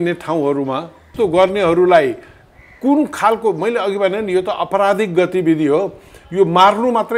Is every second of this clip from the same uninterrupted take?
no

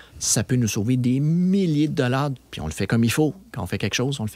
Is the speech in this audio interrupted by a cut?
yes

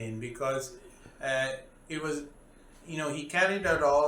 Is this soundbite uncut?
yes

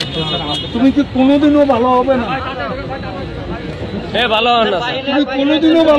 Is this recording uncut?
yes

